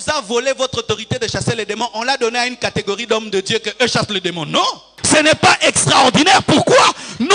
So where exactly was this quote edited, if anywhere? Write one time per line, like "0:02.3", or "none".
0:05.0